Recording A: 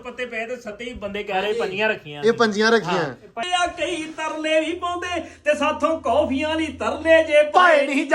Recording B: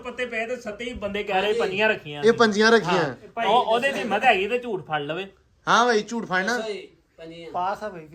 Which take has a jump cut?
A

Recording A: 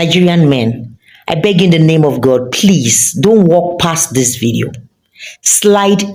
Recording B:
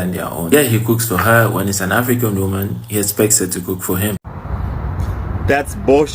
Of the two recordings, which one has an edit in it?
B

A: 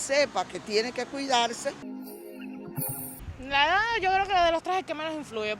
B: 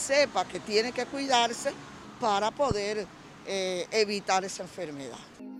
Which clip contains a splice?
A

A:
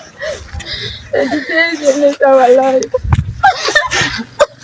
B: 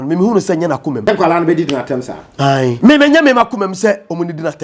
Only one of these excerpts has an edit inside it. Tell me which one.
B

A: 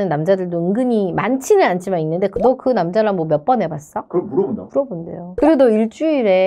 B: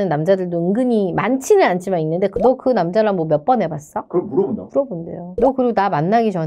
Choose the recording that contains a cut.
A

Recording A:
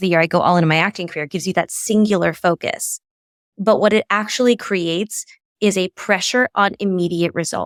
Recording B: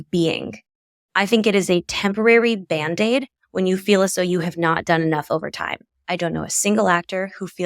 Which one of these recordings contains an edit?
B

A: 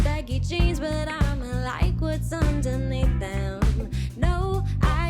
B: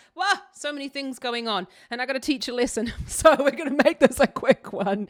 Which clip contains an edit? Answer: A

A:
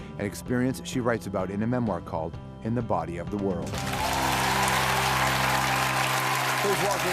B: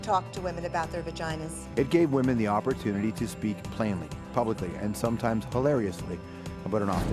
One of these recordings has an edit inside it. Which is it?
A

